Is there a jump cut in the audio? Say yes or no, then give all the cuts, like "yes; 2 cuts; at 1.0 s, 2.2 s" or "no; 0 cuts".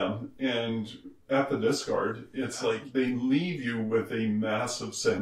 yes; 1 cut; at 2.8 s